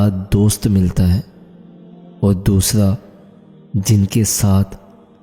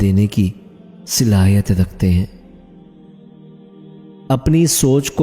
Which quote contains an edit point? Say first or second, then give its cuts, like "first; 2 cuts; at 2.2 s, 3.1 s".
second; 2 cuts; at 2.4 s, 4.0 s